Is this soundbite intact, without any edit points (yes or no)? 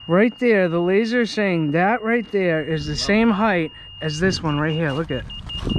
yes